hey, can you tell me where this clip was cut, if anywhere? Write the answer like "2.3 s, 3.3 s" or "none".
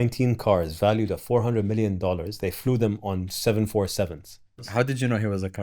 4.7 s